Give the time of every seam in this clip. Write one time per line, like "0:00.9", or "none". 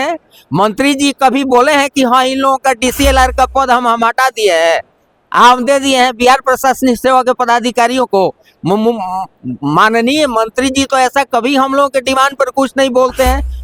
none